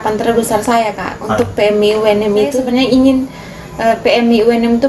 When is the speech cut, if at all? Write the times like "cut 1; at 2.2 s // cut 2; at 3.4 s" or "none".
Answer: cut 1; at 2.5 s